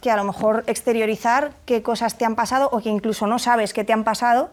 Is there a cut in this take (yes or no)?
no